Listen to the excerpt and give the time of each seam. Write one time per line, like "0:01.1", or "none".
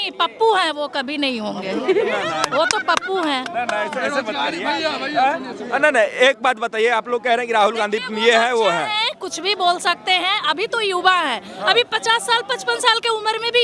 none